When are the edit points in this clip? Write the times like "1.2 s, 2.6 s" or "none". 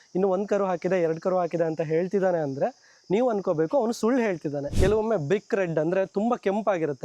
4.7 s